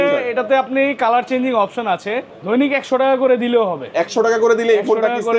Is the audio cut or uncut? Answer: cut